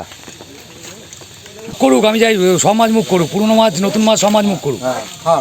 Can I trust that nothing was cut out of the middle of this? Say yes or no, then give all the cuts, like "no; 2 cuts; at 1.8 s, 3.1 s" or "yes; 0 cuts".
no; 1 cut; at 1.8 s